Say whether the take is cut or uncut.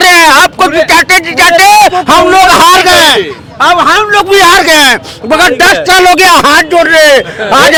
uncut